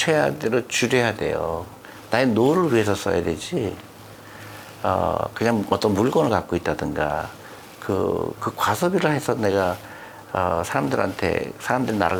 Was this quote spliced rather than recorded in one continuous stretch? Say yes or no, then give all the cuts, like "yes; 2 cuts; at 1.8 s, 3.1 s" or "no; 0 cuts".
no; 0 cuts